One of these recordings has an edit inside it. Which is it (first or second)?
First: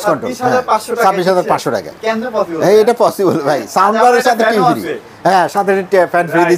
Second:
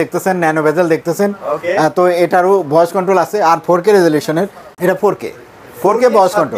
second